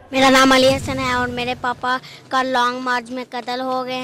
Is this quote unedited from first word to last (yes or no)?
no